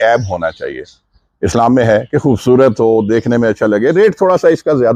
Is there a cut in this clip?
no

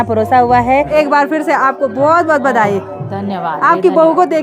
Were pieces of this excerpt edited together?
yes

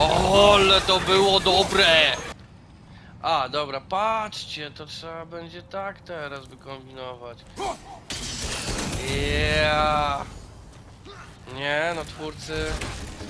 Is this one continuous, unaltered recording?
no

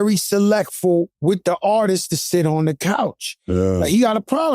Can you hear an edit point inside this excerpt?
yes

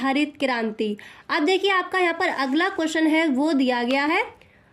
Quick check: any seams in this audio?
no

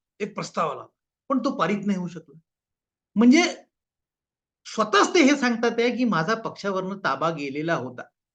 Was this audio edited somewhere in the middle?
no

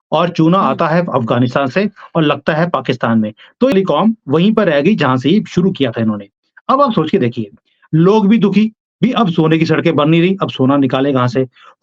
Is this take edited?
yes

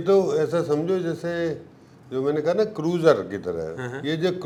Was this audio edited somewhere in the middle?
no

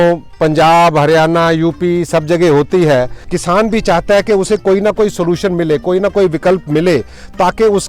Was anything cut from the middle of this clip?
yes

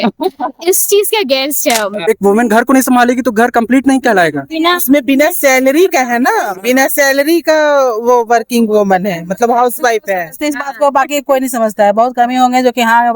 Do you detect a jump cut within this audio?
yes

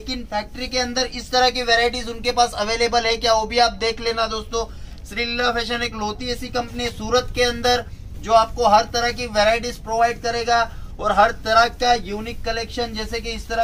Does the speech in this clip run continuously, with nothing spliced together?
yes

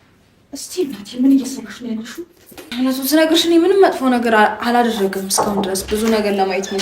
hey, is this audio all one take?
no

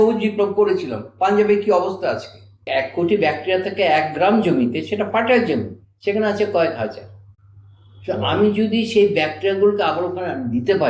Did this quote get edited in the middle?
yes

